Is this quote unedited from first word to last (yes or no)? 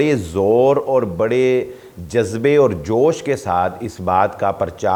yes